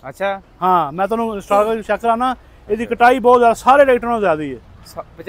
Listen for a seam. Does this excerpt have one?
no; 0 cuts

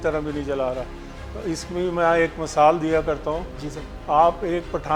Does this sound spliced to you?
no; 0 cuts

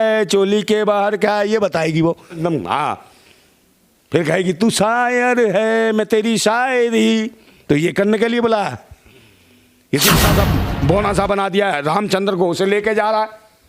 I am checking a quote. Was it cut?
yes; 2 cuts; at 2.4 s, 10.2 s

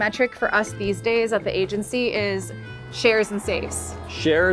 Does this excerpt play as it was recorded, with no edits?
yes; 0 cuts

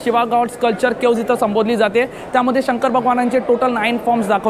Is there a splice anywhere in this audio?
no; 0 cuts

